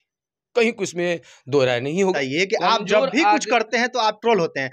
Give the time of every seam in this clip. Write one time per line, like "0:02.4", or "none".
0:02.1

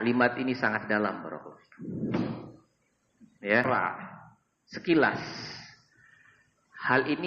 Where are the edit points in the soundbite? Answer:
0:03.6

